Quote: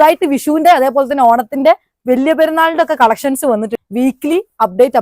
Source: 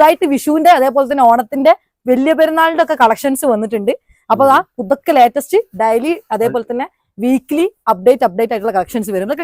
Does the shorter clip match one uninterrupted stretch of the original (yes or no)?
no